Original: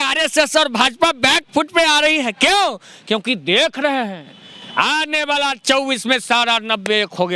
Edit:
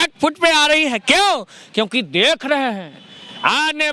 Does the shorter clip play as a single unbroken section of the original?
yes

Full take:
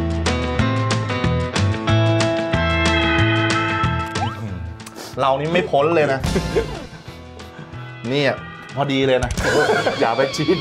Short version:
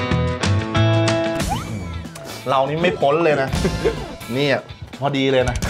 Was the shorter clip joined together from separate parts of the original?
yes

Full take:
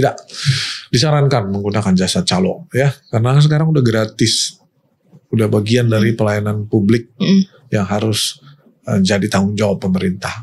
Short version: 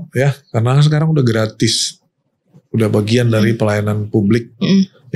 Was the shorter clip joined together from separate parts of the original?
no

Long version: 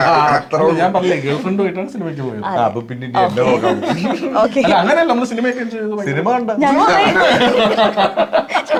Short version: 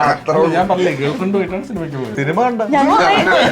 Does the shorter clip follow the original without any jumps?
no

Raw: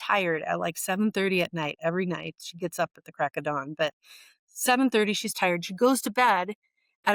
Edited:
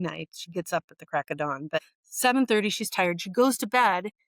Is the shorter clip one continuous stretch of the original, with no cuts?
no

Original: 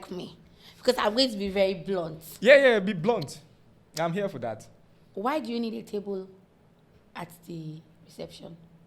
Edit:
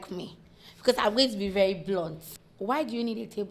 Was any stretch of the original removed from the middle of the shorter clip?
yes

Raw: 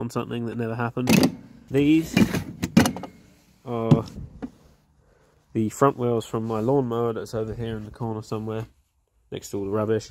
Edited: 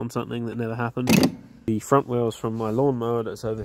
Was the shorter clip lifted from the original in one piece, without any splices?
no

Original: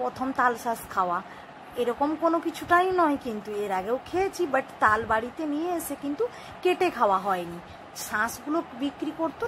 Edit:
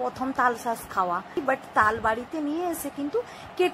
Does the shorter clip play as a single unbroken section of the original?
no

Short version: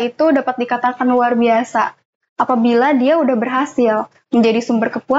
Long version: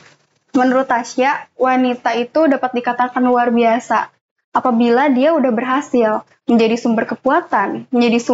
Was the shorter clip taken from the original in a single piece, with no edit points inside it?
yes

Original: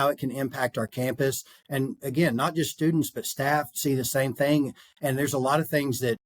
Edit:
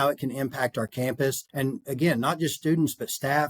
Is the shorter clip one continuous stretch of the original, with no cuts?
no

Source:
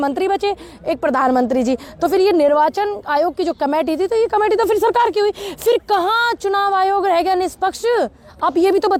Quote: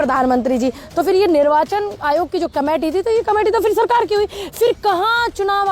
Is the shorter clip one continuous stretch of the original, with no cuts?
yes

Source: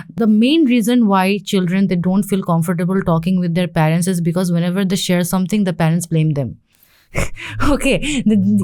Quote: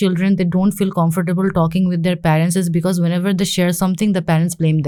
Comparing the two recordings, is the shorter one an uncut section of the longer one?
yes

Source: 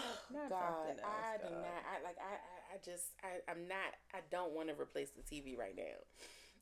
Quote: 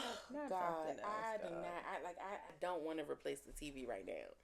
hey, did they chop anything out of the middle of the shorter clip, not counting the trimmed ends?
yes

